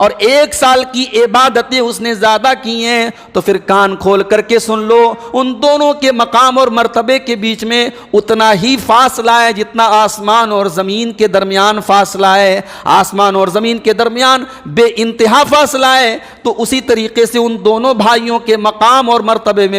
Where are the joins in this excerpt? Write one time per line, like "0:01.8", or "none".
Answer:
none